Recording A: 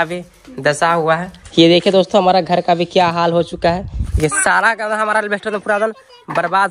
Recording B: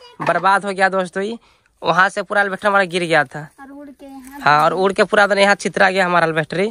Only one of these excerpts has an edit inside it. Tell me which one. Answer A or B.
A